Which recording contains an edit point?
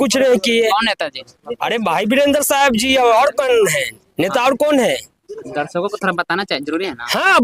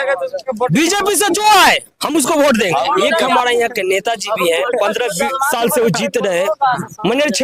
second; 1 cut; at 3.3 s

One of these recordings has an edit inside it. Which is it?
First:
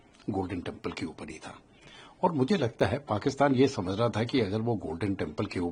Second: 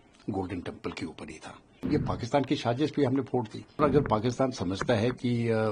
second; 2 cuts; at 1.8 s, 3.8 s

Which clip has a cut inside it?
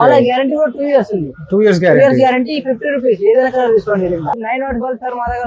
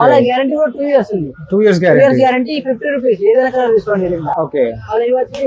first; 1 cut; at 4.3 s

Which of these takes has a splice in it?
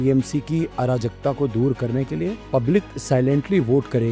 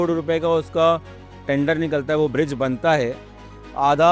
first; 1 cut; at 2.4 s

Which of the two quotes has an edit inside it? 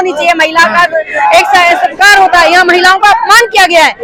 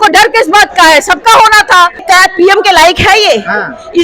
second; 1 cut; at 2.0 s

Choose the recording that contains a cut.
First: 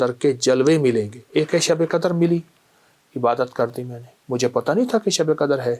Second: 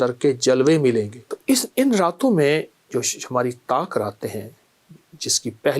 second; 1 cut; at 1.2 s

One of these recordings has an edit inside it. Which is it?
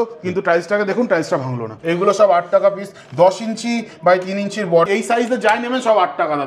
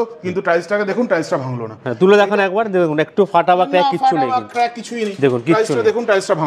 first; 2 cuts; at 1.7 s, 4.9 s

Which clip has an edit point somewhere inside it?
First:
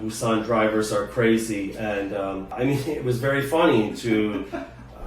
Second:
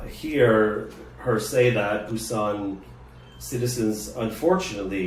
first; 1 cut; at 2.5 s

